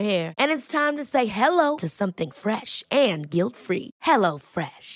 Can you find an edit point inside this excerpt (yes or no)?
no